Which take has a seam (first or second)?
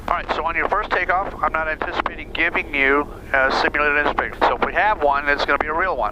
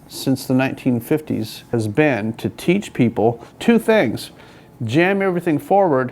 second